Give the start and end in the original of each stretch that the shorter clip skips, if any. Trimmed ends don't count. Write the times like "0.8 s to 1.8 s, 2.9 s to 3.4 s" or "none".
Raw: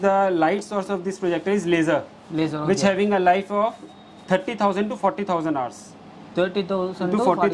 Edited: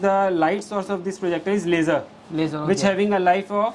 none